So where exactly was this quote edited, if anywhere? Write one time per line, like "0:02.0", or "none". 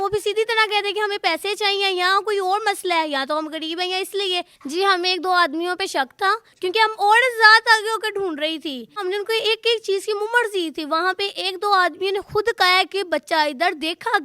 0:04.6
0:06.5
0:09.0